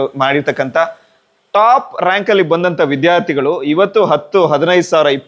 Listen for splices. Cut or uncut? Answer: uncut